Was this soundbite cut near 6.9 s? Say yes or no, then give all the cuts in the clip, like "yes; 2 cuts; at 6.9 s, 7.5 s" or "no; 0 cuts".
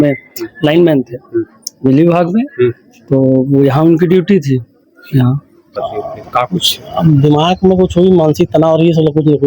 no; 1 cut; at 5.6 s